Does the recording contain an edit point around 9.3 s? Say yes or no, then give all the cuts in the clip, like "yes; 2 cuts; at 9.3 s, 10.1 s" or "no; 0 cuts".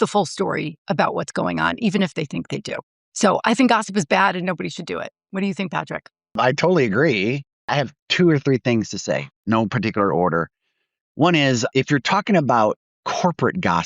yes; 4 cuts; at 6.3 s, 7.7 s, 9.3 s, 11.7 s